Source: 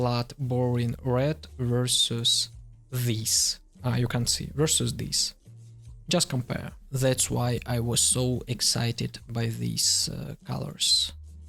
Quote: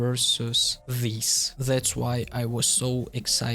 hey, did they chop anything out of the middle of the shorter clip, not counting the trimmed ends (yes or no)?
yes